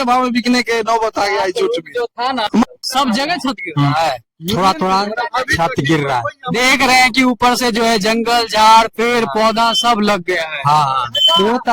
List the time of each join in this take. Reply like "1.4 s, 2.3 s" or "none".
2.6 s